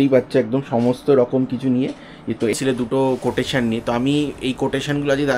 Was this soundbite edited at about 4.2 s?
no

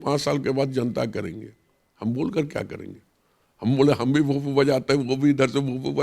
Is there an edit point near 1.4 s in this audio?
no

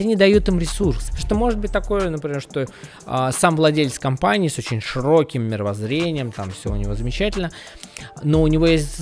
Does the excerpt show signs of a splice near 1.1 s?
yes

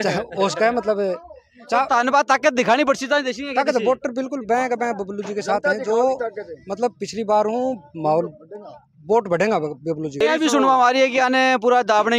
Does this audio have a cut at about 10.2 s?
yes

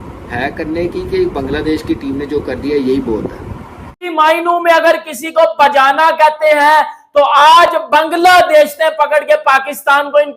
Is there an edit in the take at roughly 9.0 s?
no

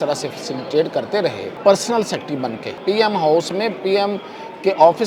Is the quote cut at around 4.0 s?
no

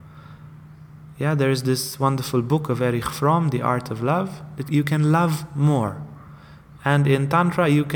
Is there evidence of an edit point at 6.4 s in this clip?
no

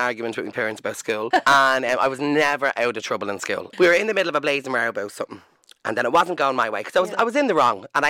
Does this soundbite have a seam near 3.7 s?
yes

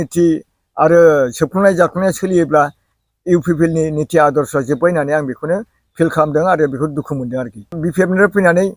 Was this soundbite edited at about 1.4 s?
no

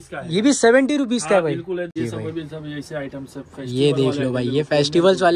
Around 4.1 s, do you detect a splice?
no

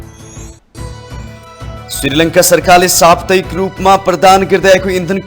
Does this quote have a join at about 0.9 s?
yes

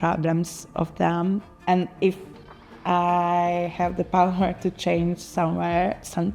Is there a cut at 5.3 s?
no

